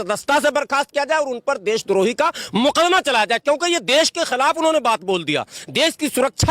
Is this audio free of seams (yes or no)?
yes